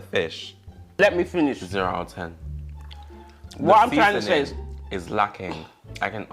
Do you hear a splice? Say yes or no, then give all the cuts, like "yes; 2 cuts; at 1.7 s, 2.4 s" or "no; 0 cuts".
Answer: yes; 1 cut; at 1.0 s